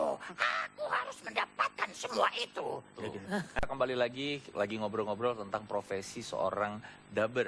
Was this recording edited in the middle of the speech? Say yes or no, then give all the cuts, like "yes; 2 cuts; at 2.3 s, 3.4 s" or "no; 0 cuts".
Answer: yes; 1 cut; at 2.8 s